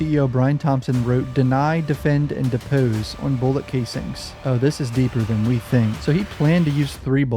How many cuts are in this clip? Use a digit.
1